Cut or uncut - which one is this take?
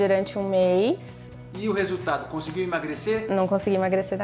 cut